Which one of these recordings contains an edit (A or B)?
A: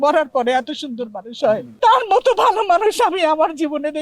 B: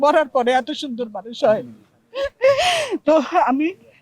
A